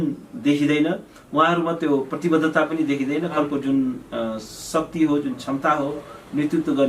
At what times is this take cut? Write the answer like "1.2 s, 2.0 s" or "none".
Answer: 3.4 s